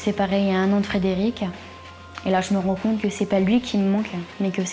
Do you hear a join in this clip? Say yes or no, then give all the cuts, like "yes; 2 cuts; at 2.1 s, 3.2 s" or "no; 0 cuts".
no; 0 cuts